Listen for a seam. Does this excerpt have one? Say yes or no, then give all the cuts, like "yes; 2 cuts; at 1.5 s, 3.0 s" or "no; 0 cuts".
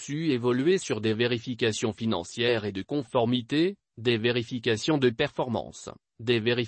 no; 0 cuts